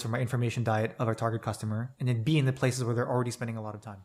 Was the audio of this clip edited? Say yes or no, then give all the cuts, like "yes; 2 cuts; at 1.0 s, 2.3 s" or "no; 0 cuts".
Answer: no; 0 cuts